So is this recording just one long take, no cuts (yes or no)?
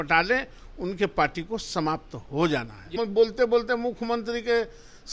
no